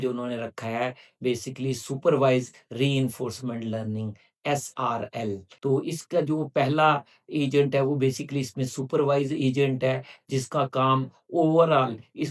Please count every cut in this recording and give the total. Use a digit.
1